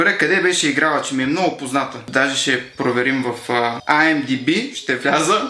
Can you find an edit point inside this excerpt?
yes; 1 cut; at 2.0 s

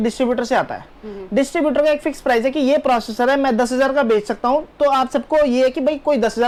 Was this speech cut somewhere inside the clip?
no; 0 cuts

